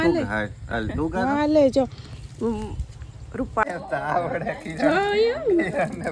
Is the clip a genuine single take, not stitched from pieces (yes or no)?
no